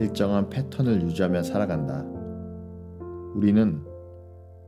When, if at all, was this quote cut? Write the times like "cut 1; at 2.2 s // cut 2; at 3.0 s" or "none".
cut 1; at 1.9 s // cut 2; at 3.3 s